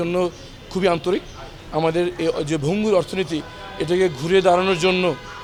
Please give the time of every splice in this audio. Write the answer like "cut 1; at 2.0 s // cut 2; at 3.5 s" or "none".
none